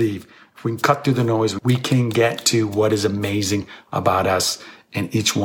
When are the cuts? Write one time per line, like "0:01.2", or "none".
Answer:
0:01.6